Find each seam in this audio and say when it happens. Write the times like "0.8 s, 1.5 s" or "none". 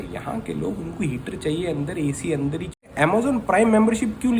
2.9 s